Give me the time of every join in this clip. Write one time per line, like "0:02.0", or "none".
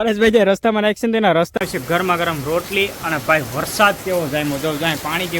0:01.5